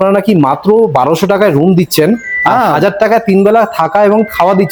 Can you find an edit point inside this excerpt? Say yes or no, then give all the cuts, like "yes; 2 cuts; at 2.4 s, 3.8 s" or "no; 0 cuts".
no; 0 cuts